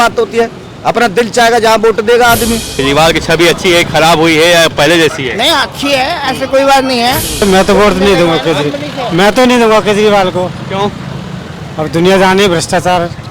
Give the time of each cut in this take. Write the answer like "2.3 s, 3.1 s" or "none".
2.7 s, 7.4 s